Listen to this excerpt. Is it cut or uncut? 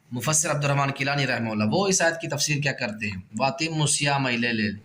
uncut